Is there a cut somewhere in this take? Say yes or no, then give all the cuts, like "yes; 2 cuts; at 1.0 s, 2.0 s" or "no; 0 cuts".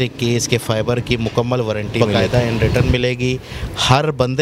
yes; 1 cut; at 2.0 s